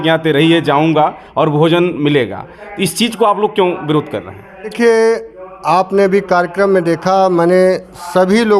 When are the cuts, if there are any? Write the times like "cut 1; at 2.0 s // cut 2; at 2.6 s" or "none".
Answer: cut 1; at 4.7 s